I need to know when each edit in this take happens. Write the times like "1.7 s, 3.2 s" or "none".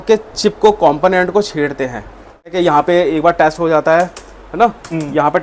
2.5 s